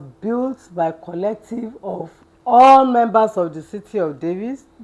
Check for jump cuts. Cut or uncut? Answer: uncut